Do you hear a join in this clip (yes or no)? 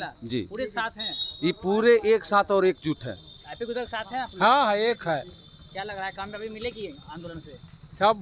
no